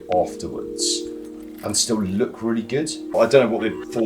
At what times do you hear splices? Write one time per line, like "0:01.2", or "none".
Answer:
0:03.2

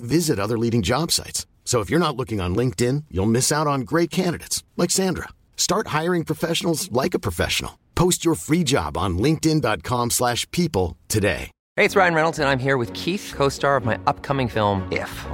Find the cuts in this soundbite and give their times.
0:11.6

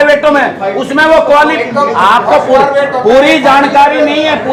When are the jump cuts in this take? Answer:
none

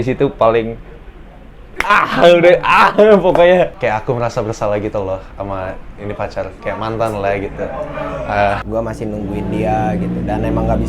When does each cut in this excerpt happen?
0:03.8
0:08.6

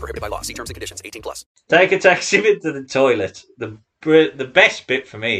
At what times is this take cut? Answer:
0:01.5

